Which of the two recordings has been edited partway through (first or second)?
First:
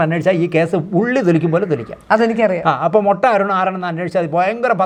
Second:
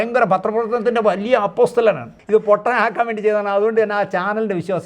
second